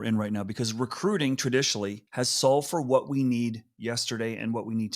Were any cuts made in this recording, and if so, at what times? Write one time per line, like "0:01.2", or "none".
0:02.0